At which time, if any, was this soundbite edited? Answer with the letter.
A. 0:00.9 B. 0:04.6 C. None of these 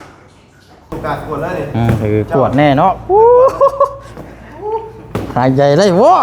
A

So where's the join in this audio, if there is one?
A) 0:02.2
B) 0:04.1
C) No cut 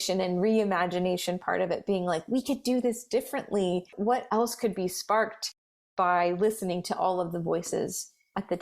B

